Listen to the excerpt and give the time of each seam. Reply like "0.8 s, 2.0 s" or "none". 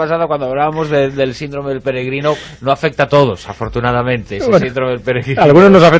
2.1 s